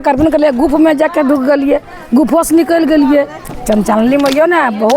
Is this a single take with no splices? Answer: no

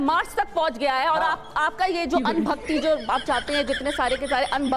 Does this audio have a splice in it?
no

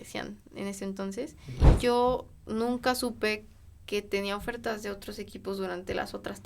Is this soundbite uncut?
no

